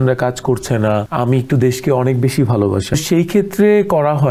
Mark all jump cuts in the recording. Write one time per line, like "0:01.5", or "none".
0:01.1
0:02.9